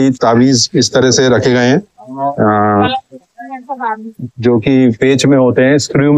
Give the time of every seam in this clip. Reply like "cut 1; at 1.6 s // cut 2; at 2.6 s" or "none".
none

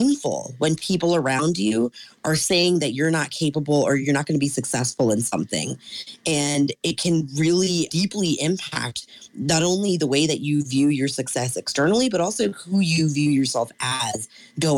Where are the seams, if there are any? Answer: cut 1; at 4.0 s // cut 2; at 7.9 s

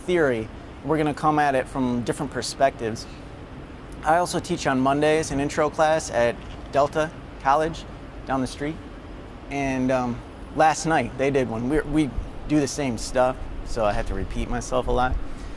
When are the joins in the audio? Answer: cut 1; at 11.9 s

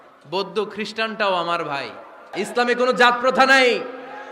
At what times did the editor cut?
cut 1; at 2.3 s

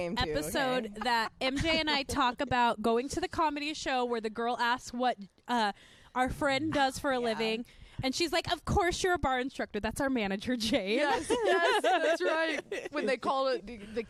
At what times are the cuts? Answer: none

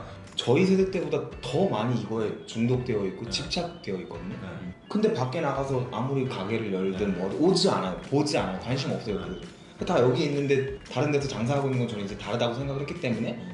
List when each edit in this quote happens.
none

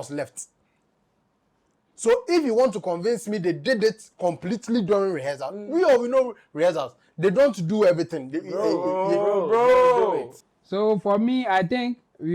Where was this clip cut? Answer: cut 1; at 10.3 s

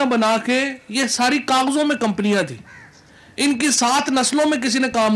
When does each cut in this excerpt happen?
none

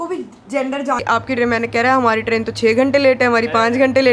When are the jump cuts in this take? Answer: cut 1; at 1.0 s

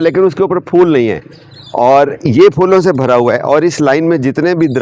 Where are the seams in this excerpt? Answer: none

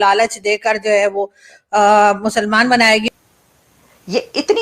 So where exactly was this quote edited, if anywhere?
cut 1; at 3.1 s

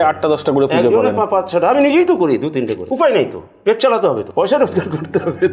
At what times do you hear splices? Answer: cut 1; at 2.8 s // cut 2; at 4.3 s

